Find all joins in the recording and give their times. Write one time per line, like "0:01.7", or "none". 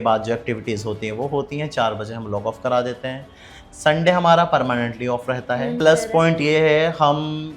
0:05.8